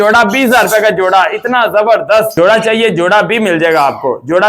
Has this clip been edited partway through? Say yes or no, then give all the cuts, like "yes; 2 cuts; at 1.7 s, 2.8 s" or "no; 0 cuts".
yes; 1 cut; at 2.3 s